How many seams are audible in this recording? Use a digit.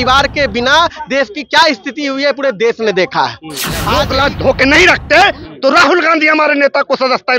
1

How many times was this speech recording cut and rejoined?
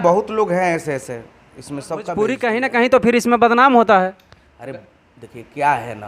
1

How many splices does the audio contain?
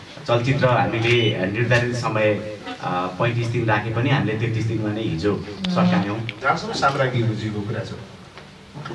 1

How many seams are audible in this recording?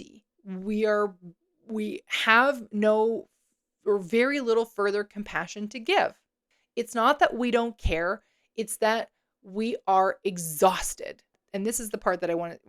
2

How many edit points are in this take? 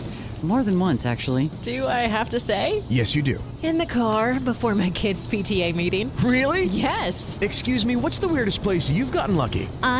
0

